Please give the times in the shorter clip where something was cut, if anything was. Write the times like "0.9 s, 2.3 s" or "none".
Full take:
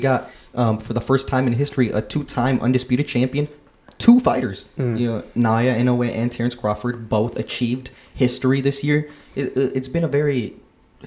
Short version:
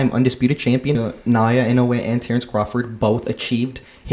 1.1 s